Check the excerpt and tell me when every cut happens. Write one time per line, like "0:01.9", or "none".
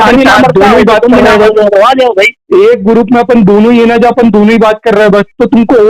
none